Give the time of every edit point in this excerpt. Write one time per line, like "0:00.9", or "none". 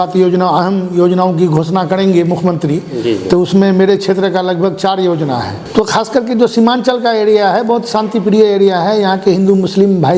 0:05.6